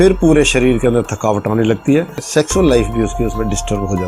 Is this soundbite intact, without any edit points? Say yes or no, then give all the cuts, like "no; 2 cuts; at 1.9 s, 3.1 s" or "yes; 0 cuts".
no; 1 cut; at 2.2 s